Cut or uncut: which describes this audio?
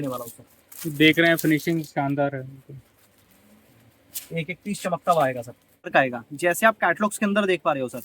cut